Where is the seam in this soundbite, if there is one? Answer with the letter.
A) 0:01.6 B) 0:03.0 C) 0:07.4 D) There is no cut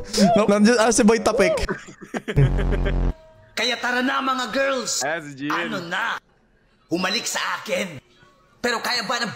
A